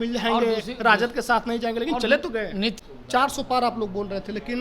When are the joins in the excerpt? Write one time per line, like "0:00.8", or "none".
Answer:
0:02.8